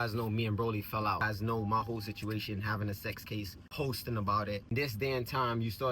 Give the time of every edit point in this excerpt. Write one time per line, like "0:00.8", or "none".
0:01.2
0:03.6
0:04.7